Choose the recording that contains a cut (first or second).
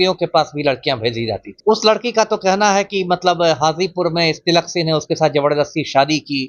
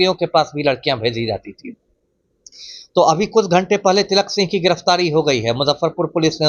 first